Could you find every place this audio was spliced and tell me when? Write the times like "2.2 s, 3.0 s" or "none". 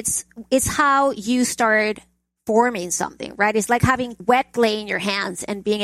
4.2 s